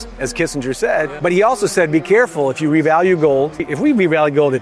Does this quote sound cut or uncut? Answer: cut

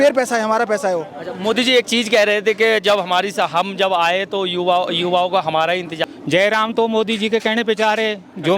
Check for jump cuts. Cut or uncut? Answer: cut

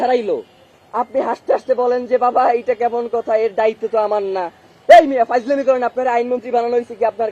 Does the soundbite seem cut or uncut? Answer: uncut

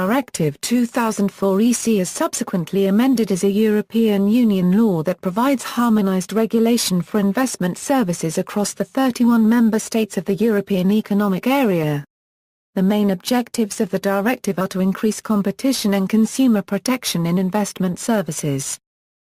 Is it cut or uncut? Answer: uncut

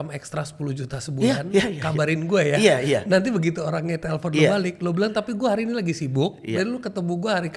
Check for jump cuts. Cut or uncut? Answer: uncut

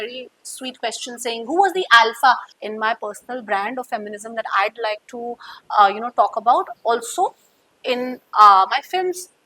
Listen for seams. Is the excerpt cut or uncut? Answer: cut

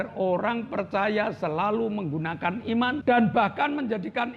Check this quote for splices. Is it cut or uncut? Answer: cut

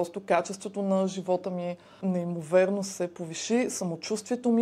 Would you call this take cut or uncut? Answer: cut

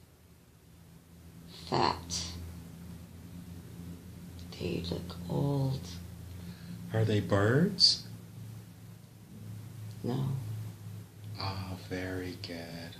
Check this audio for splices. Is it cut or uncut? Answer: uncut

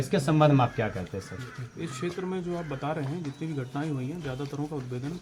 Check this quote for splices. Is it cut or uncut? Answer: uncut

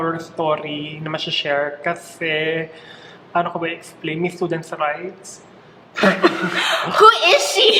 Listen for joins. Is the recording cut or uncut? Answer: uncut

